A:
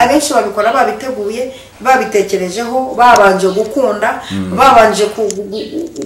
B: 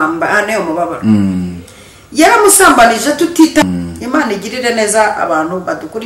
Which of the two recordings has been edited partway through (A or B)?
B